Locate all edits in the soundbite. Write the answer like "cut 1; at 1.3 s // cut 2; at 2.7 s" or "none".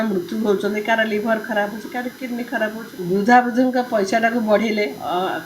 cut 1; at 2.9 s